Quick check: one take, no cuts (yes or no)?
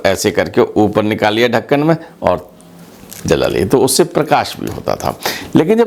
yes